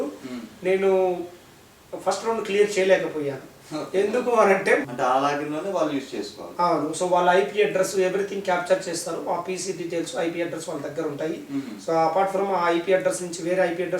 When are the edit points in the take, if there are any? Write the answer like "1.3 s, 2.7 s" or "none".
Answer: 4.9 s